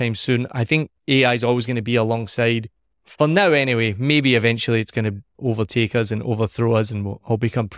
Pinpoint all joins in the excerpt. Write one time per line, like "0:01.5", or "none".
none